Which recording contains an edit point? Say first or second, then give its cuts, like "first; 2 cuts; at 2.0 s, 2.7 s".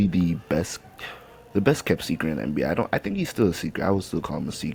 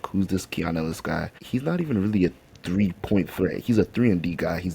second; 1 cut; at 1.3 s